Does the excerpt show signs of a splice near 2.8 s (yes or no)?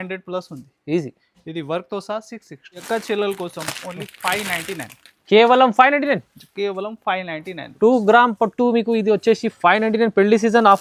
yes